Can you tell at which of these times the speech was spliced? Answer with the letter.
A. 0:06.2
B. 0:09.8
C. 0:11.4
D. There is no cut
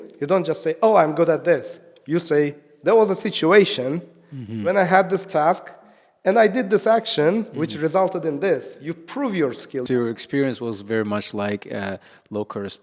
B